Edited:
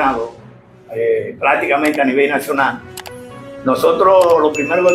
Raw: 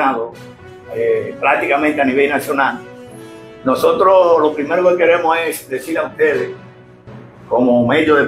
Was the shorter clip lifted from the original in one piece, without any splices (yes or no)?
yes